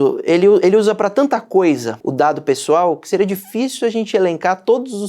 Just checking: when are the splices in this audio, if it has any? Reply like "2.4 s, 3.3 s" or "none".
2.0 s